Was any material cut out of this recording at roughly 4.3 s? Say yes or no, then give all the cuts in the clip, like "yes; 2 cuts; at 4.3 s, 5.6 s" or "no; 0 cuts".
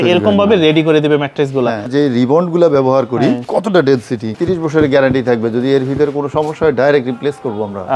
yes; 3 cuts; at 1.9 s, 3.4 s, 4.3 s